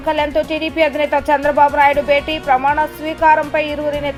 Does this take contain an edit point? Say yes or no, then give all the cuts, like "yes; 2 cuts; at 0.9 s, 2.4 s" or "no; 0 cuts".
no; 0 cuts